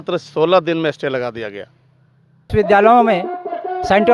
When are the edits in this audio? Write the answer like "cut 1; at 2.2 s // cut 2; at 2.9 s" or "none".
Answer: cut 1; at 2.5 s